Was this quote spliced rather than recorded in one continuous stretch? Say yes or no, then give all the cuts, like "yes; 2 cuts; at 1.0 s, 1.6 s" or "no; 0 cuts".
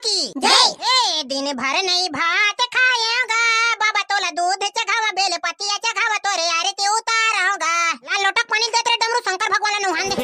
yes; 1 cut; at 8.1 s